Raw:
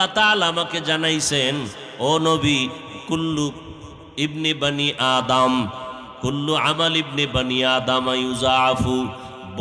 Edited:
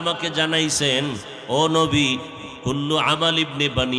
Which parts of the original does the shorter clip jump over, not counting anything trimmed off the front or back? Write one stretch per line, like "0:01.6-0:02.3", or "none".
0:02.9-0:06.0